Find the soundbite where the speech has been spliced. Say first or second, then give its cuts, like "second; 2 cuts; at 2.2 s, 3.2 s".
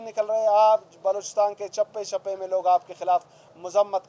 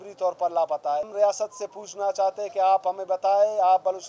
second; 1 cut; at 1.1 s